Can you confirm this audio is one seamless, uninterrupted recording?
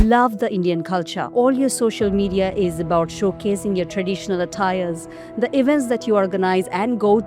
no; 1 cut; at 1.2 s

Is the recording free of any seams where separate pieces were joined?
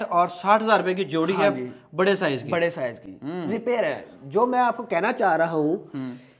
yes; 0 cuts

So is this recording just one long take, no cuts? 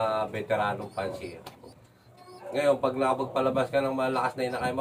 no; 1 cut; at 1.6 s

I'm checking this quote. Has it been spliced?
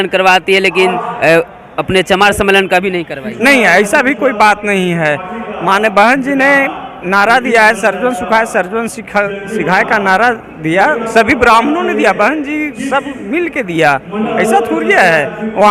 no; 0 cuts

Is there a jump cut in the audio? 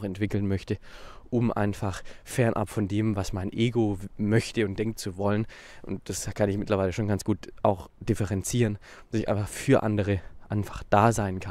no; 0 cuts

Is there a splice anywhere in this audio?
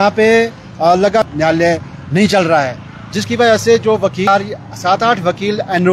yes; 2 cuts; at 1.3 s, 4.3 s

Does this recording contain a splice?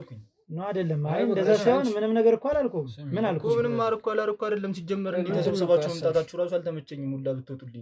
no; 0 cuts

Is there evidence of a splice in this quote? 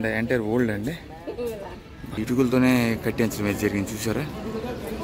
yes; 1 cut; at 2.2 s

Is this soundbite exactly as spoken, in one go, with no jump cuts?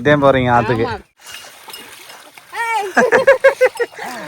no; 1 cut; at 1.2 s

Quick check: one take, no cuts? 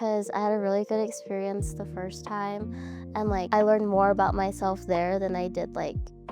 yes; 0 cuts

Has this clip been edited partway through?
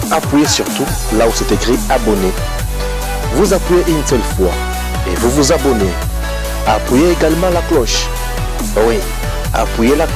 no; 0 cuts

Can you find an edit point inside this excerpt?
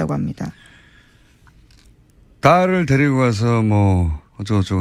no; 0 cuts

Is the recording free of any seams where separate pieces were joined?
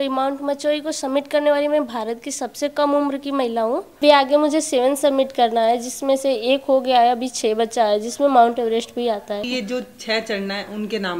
no; 2 cuts; at 4.0 s, 9.5 s

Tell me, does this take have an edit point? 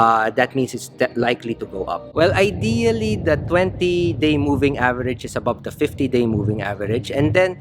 yes; 1 cut; at 2.0 s

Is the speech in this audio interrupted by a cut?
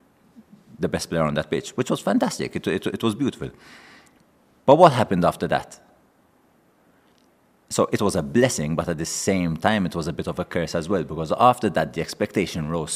no; 0 cuts

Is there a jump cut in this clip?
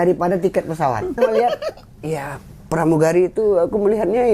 yes; 1 cut; at 1.2 s

